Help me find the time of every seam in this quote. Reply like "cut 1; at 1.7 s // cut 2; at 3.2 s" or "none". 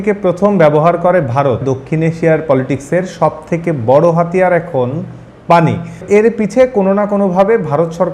cut 1; at 1.6 s // cut 2; at 6.0 s

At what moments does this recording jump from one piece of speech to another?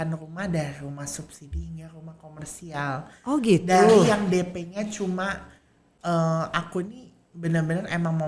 cut 1; at 5.8 s

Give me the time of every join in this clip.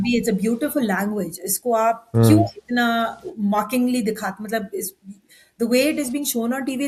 none

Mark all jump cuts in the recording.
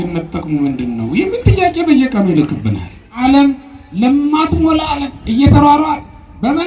cut 1; at 3.1 s

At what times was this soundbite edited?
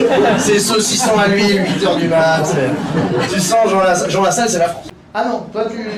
cut 1; at 4.8 s

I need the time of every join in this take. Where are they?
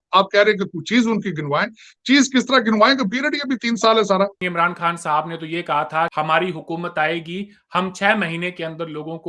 cut 1; at 4.4 s // cut 2; at 6.1 s

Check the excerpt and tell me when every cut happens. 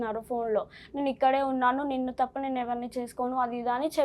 none

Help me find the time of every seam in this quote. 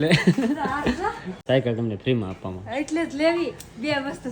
cut 1; at 1.4 s

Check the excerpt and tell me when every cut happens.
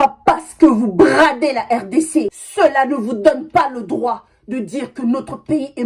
cut 1; at 2.3 s

